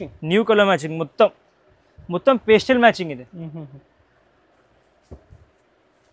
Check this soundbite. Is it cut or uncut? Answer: uncut